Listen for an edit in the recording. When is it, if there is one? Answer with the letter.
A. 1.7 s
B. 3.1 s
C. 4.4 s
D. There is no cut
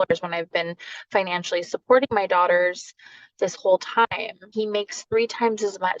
C